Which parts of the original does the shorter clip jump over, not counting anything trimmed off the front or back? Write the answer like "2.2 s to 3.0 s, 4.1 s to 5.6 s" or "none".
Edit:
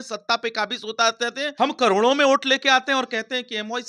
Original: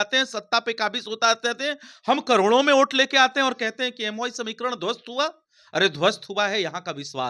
1.7 s to 2.0 s